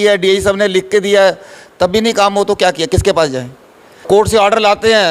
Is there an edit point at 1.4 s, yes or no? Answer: no